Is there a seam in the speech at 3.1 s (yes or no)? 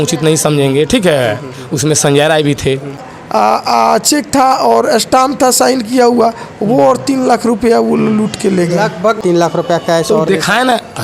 yes